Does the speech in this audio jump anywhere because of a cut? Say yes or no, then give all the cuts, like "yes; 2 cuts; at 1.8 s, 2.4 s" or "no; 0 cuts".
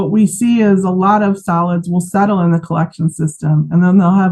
no; 0 cuts